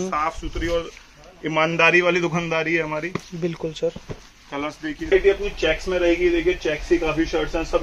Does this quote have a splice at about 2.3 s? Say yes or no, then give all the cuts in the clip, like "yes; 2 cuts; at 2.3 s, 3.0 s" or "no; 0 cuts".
no; 1 cut; at 5.1 s